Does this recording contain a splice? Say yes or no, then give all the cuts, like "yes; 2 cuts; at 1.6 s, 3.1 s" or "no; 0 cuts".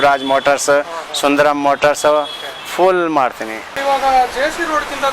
yes; 1 cut; at 3.8 s